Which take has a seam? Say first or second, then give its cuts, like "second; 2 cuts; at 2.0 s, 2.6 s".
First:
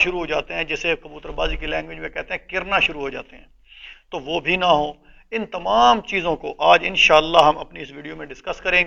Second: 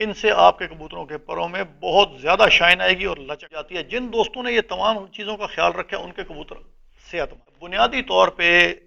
second; 2 cuts; at 3.8 s, 7.6 s